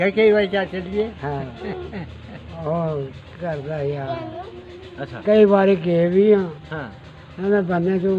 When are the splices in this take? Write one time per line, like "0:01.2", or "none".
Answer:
none